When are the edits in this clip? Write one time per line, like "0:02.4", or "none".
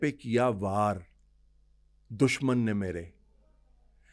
none